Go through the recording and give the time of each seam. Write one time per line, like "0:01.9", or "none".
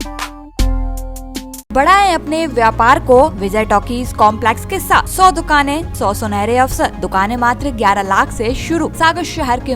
0:01.7
0:03.4
0:05.1
0:05.9
0:07.0
0:08.9